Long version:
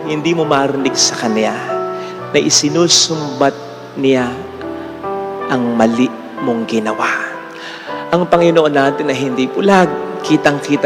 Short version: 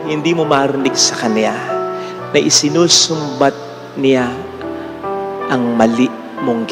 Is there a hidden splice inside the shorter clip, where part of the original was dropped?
no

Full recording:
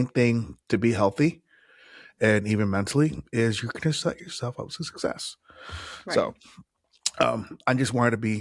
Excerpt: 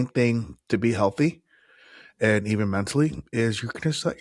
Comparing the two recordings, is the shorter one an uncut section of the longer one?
yes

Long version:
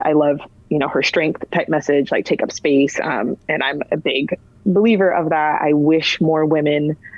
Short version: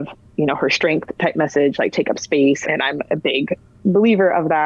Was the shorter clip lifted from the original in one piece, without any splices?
no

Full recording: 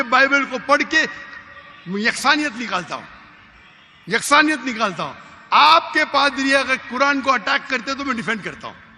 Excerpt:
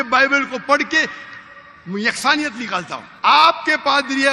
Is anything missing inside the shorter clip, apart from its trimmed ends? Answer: yes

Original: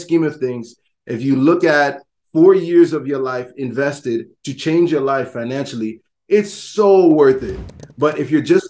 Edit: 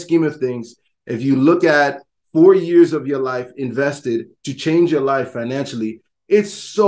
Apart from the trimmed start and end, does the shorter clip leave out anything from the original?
no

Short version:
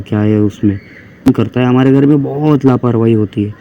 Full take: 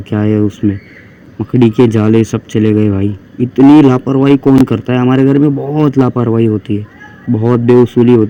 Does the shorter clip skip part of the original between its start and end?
yes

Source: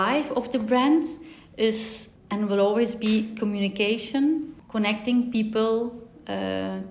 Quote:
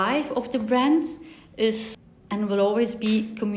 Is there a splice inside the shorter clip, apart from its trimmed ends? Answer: no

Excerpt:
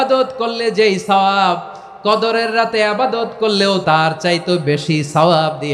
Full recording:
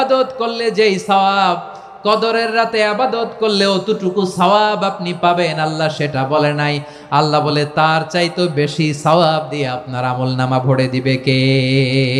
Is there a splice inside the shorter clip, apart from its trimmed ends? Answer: yes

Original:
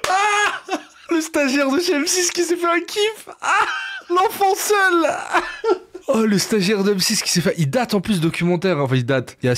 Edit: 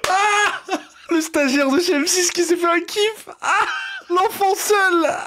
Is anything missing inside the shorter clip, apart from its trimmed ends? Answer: no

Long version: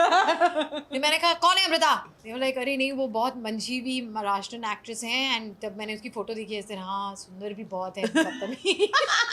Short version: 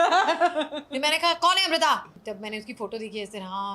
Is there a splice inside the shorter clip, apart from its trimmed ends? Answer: yes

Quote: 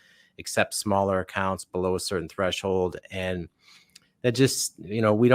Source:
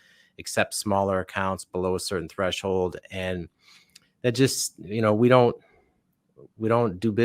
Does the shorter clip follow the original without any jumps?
yes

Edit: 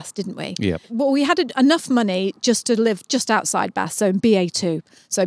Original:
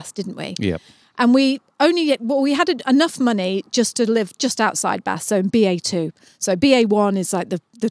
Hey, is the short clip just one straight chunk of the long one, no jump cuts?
no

